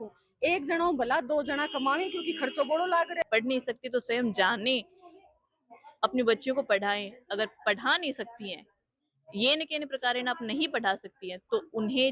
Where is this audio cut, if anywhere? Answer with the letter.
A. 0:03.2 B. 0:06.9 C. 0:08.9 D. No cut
A